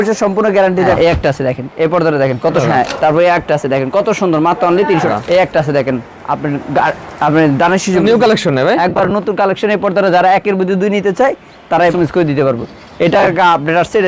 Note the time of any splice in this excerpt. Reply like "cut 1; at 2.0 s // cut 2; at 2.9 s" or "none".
cut 1; at 0.9 s // cut 2; at 2.6 s // cut 3; at 5.1 s // cut 4; at 8.0 s // cut 5; at 11.9 s